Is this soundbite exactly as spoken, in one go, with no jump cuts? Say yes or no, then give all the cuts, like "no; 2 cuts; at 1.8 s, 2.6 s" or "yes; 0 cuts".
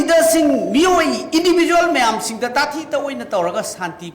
yes; 0 cuts